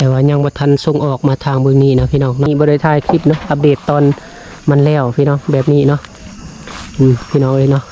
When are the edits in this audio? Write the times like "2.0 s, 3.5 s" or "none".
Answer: 2.5 s